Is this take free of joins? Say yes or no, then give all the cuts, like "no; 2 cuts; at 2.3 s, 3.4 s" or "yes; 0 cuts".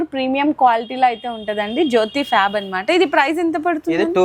yes; 0 cuts